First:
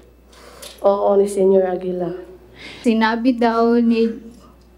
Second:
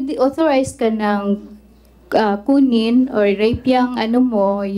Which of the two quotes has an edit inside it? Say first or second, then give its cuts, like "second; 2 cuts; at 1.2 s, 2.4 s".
first; 1 cut; at 2.7 s